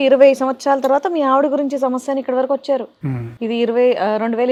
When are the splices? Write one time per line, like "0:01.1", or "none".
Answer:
none